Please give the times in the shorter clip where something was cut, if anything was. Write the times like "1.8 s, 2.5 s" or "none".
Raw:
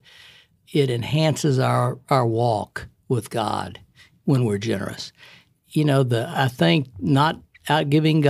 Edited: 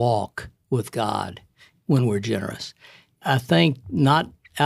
3.2 s